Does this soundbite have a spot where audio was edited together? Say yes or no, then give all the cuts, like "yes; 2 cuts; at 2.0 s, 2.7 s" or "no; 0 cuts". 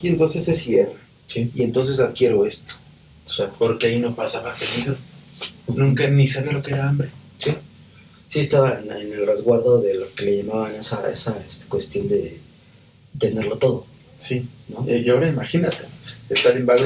no; 0 cuts